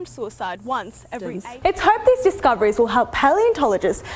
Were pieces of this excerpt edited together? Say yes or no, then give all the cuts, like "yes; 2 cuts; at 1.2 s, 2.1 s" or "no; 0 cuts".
yes; 1 cut; at 1.4 s